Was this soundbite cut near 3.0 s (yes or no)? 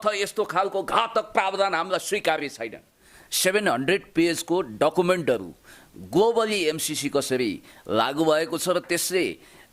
yes